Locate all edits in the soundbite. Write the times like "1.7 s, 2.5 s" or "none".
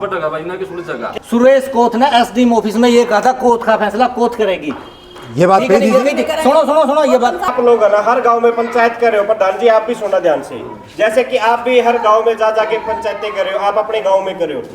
1.0 s, 7.5 s